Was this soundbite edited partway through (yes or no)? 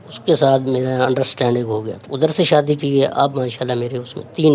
yes